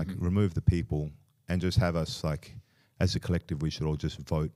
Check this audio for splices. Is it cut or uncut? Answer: uncut